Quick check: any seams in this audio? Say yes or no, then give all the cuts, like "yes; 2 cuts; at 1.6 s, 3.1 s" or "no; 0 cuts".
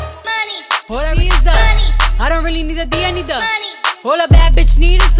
yes; 1 cut; at 1.2 s